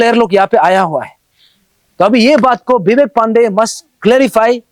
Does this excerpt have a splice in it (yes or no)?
no